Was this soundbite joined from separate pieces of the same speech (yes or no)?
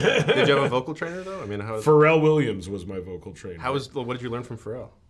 no